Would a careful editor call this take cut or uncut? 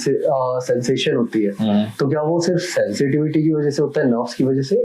uncut